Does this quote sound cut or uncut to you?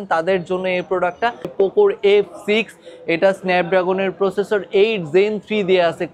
cut